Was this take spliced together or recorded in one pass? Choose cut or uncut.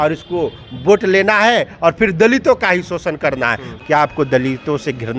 cut